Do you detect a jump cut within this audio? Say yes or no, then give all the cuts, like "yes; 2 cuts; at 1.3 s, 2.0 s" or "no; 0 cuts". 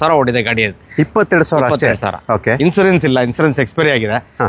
no; 0 cuts